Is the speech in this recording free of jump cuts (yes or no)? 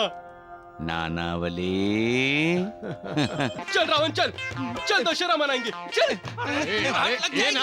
no